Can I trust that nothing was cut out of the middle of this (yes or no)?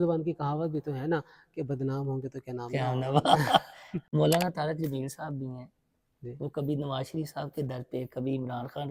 yes